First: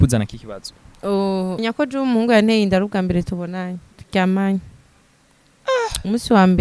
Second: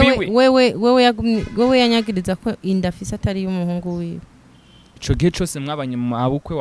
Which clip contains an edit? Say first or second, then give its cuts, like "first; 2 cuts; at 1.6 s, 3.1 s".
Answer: first; 1 cut; at 1.6 s